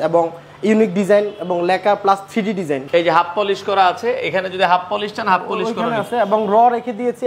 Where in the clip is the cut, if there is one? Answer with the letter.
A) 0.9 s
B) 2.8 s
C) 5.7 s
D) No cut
B